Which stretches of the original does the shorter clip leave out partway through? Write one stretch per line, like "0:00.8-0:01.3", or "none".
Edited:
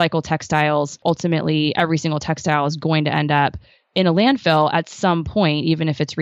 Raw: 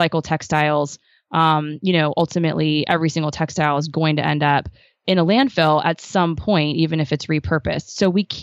0:01.0-0:02.1